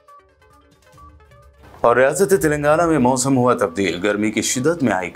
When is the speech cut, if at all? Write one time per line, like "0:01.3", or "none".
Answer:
none